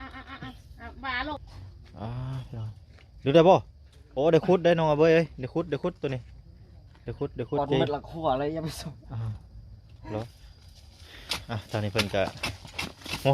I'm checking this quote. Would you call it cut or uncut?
cut